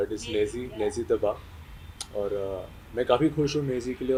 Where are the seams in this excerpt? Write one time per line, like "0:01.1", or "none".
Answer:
none